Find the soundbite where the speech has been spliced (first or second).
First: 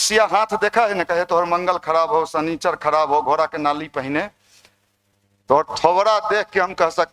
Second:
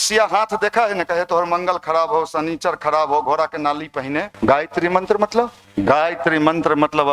second